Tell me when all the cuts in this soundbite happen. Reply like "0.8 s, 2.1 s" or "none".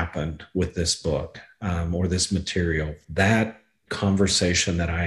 3.0 s